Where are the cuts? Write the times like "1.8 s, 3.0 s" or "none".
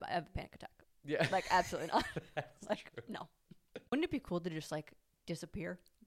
3.9 s